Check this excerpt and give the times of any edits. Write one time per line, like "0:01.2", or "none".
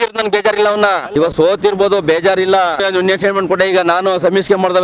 0:01.0
0:02.8